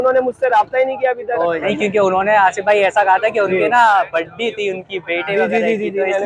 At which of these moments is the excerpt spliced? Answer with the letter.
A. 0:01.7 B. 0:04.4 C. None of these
A